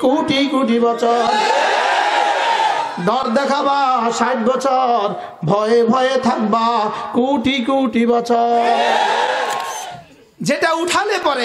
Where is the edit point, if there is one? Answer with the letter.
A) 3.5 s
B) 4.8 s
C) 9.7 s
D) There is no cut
C